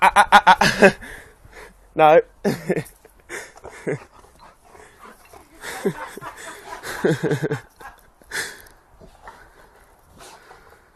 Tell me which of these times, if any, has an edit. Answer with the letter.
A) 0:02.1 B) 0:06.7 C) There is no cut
C